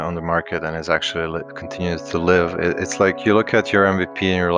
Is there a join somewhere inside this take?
no; 0 cuts

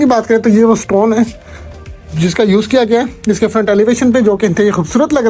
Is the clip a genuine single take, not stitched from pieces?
yes; 0 cuts

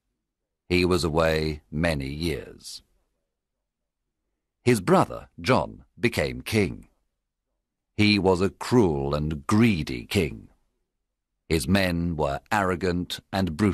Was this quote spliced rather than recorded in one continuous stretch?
yes; 1 cut; at 7.8 s

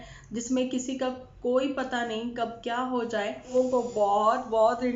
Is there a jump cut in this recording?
yes; 1 cut; at 3.5 s

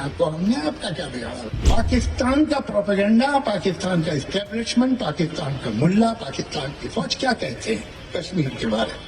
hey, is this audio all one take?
no; 1 cut; at 1.5 s

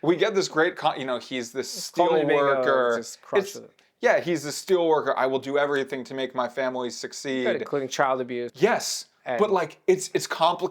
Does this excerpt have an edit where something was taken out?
yes; 1 cut; at 8.5 s

